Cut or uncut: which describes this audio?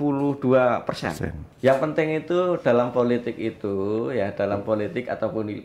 cut